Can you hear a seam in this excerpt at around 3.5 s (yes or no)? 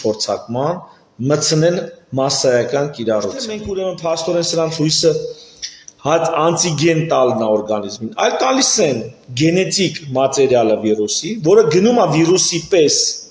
yes